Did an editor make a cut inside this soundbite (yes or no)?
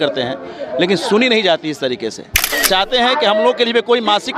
yes